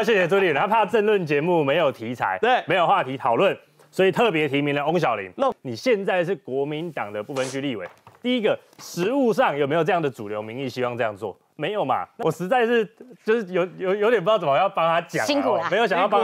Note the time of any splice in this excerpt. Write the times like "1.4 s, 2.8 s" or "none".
5.5 s, 12.1 s